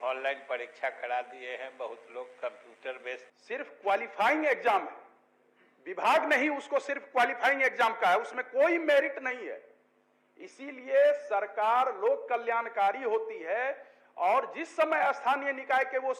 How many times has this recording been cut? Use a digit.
1